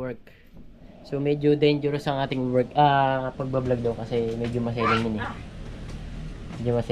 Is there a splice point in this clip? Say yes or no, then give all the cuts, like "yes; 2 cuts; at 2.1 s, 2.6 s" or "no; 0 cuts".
no; 0 cuts